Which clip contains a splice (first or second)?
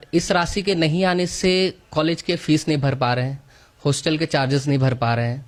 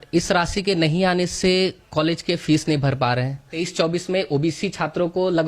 second